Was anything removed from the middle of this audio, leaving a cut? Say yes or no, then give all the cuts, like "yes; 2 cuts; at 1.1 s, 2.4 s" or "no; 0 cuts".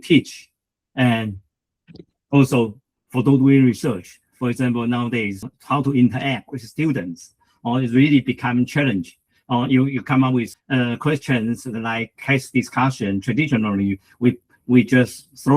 yes; 2 cuts; at 5.5 s, 10.5 s